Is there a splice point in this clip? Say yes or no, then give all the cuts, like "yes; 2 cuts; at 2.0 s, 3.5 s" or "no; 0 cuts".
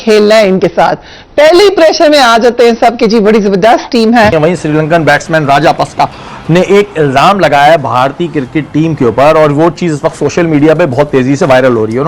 yes; 1 cut; at 4.3 s